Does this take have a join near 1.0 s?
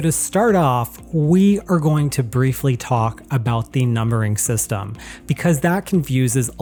no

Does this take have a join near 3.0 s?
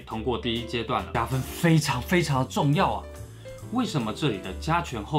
no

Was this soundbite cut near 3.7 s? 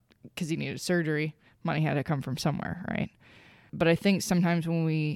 yes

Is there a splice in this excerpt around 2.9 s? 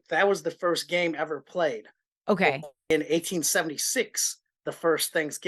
yes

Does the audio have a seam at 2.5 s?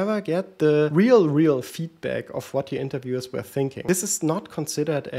no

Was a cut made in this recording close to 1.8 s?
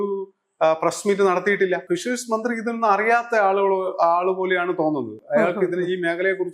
yes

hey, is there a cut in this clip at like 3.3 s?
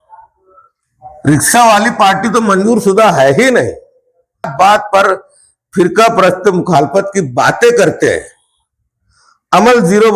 no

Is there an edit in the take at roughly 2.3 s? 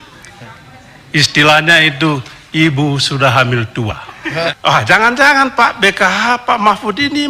no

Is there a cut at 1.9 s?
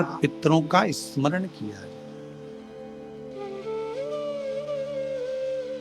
yes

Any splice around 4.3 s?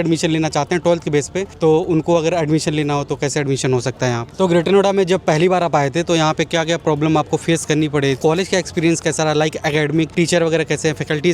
yes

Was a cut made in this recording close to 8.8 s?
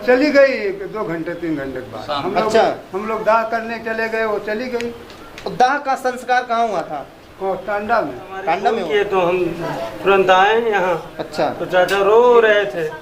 yes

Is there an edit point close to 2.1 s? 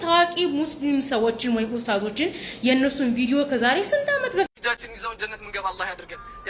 no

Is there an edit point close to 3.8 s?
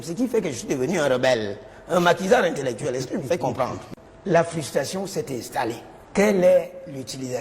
yes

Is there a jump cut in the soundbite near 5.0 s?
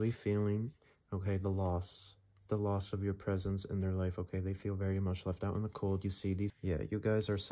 no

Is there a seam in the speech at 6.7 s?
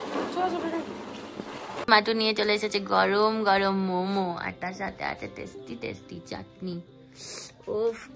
no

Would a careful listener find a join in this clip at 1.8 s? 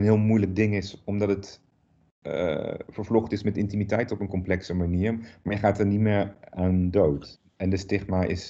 no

